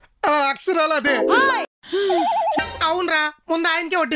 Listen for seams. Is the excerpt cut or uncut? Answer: cut